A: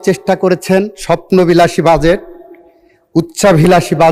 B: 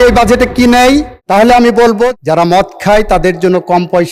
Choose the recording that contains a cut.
B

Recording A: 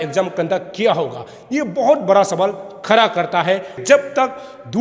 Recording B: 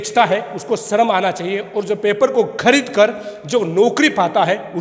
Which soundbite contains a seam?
A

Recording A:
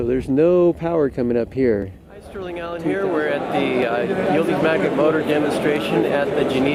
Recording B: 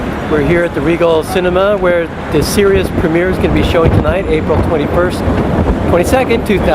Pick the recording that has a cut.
B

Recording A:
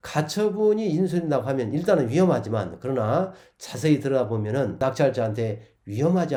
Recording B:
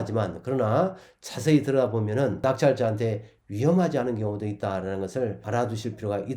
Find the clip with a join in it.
B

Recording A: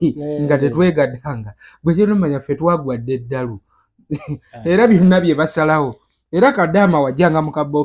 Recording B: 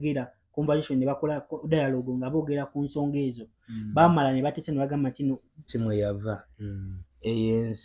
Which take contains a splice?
B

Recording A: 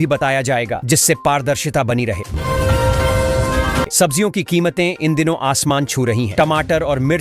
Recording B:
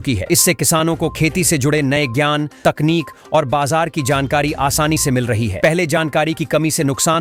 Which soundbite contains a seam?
A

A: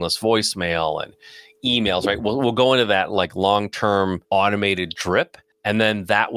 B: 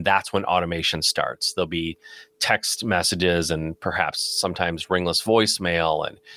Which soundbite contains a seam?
A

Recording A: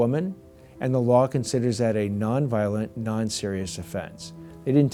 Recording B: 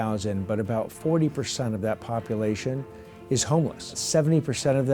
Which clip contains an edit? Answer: B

